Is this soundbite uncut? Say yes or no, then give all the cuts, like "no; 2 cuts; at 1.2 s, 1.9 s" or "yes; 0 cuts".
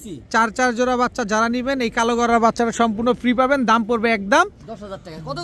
yes; 0 cuts